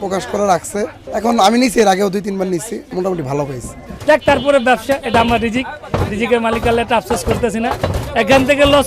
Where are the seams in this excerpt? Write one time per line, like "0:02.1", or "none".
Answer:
0:01.0
0:02.9
0:03.8